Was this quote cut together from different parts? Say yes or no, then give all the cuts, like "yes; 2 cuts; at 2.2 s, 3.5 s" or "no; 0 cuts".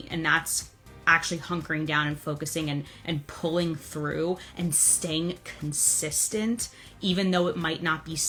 no; 0 cuts